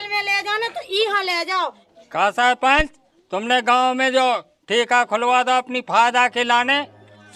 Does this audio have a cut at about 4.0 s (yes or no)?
no